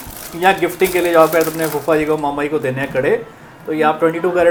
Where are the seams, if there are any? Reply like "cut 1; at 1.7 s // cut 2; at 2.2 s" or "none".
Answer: none